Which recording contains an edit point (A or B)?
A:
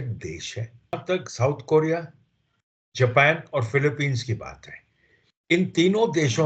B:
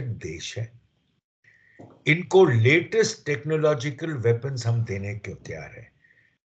A